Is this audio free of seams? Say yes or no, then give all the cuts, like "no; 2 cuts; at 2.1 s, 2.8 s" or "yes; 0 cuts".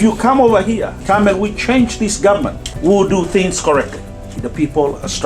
no; 3 cuts; at 0.9 s, 2.6 s, 4.4 s